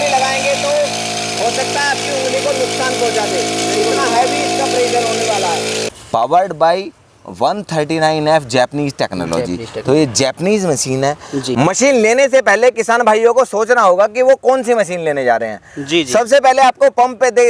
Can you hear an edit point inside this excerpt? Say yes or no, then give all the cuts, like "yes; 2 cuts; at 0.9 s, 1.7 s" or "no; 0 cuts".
yes; 2 cuts; at 5.9 s, 11.5 s